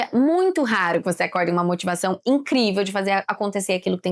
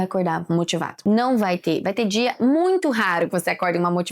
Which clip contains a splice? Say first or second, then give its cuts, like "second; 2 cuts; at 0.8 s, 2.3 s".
second; 1 cut; at 0.9 s